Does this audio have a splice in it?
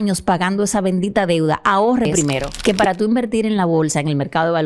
yes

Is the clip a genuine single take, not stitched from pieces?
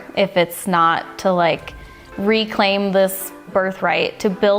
no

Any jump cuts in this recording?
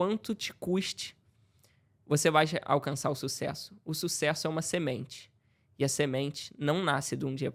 no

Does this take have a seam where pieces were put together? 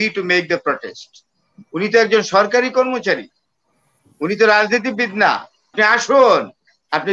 yes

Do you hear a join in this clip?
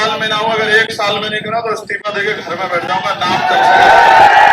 no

